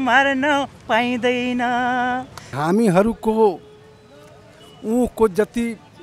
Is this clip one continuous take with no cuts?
no; 1 cut; at 2.5 s

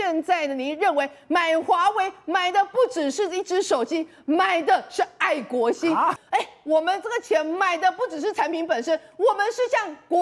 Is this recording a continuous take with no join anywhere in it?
no; 1 cut; at 6.1 s

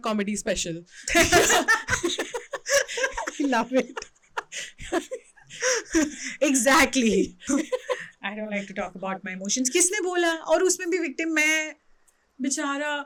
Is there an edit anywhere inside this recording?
no; 0 cuts

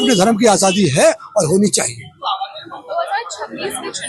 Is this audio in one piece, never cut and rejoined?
yes; 0 cuts

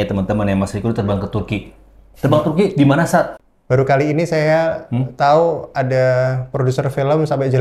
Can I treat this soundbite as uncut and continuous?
no; 1 cut; at 3.4 s

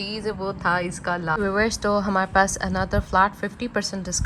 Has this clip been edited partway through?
yes; 1 cut; at 1.4 s

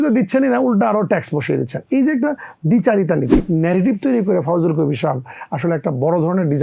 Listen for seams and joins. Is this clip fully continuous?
no; 1 cut; at 3.3 s

